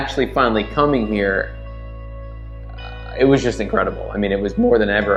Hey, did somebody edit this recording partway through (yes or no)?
no